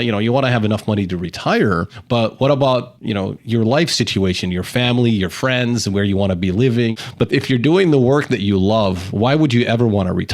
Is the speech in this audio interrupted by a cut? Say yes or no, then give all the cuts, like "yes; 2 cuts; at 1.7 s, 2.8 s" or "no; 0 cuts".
no; 0 cuts